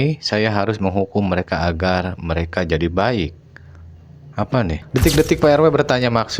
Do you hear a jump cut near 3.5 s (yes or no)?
no